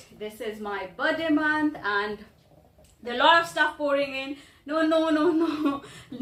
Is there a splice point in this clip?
no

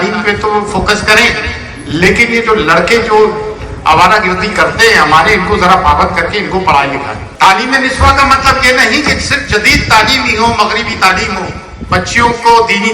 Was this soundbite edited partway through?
yes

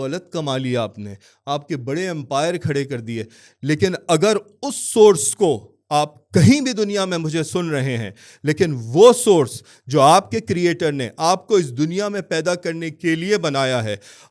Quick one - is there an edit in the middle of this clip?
no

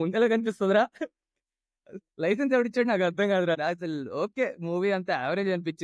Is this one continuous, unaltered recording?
no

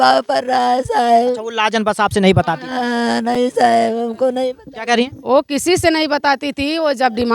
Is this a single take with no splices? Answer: yes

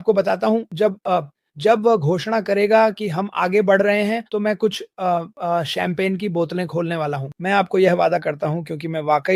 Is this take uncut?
yes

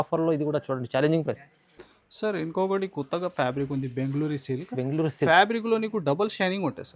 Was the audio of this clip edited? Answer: no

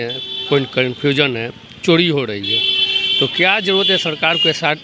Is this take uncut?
yes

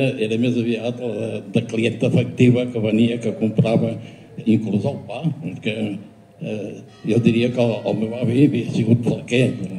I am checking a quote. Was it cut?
no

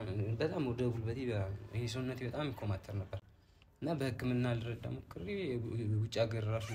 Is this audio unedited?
yes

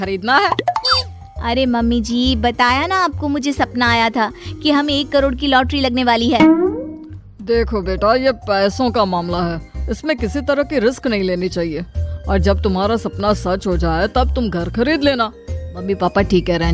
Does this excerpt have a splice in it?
yes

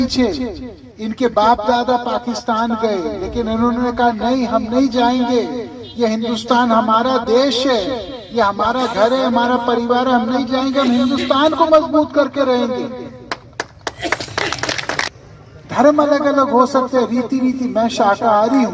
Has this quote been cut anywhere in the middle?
no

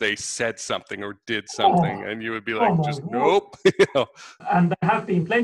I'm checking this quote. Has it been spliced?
yes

